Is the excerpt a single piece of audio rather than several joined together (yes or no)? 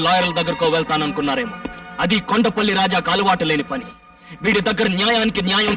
yes